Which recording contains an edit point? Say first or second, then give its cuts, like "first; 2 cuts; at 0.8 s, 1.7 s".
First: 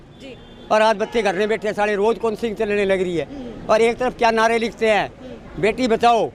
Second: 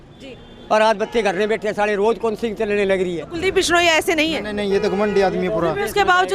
second; 1 cut; at 3.3 s